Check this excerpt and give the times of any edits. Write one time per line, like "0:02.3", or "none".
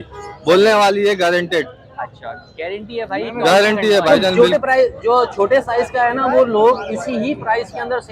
0:04.1